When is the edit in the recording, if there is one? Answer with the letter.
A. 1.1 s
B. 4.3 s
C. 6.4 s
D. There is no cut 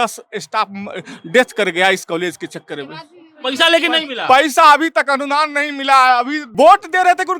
C